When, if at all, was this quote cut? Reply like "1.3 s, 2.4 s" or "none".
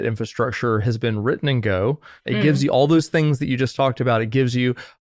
none